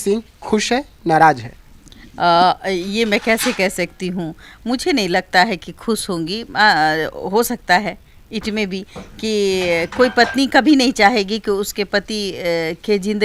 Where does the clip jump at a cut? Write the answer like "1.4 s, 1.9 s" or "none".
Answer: none

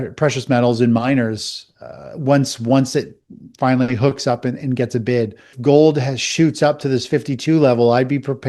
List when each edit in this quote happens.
5.5 s

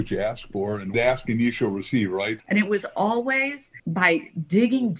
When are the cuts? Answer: 0.9 s, 2.4 s, 3.8 s

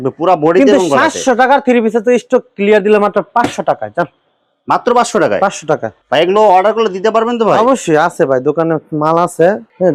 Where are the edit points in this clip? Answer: none

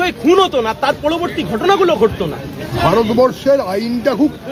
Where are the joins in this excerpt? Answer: none

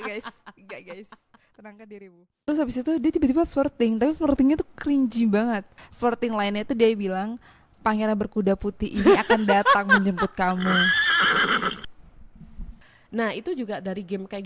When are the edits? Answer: 2.5 s, 5.8 s, 12.8 s

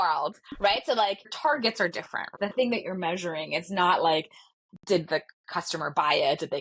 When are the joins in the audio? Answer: 1.3 s, 2.4 s

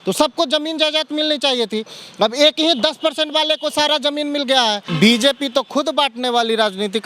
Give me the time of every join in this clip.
4.9 s

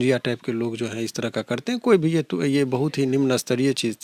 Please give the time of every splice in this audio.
none

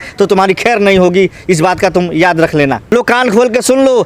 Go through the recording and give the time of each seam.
2.8 s

